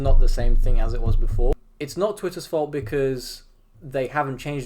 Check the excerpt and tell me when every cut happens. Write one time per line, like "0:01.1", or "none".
0:01.5